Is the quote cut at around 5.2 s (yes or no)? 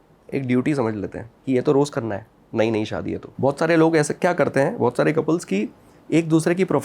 no